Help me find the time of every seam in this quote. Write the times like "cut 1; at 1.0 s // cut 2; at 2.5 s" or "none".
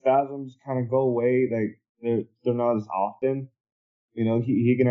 cut 1; at 3.1 s